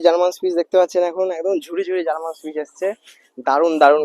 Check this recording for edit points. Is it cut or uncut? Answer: uncut